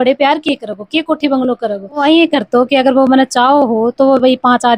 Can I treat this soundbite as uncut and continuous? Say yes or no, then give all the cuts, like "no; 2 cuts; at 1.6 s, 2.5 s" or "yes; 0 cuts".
no; 1 cut; at 2.0 s